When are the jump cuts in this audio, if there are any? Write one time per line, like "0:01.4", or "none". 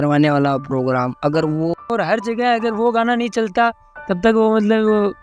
0:01.8